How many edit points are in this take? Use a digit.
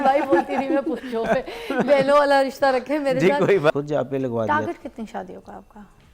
1